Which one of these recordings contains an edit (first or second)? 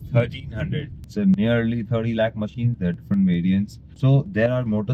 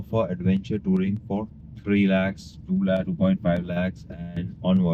first